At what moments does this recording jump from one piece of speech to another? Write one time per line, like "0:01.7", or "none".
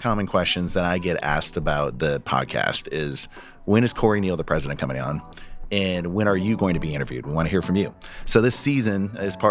none